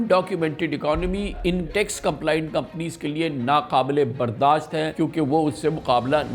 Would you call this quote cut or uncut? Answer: cut